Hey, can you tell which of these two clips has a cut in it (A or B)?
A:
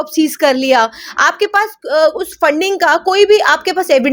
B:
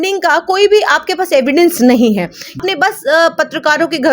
B